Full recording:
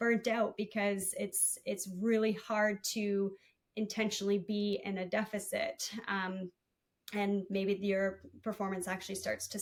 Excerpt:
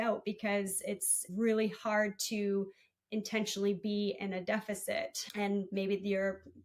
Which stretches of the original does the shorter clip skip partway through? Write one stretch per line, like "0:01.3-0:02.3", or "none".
0:01.5-0:01.9
0:05.8-0:07.0